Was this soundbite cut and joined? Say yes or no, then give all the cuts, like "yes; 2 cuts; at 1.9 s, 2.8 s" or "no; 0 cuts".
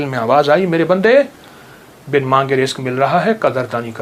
no; 0 cuts